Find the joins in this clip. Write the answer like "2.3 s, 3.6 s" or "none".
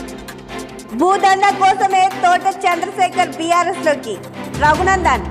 none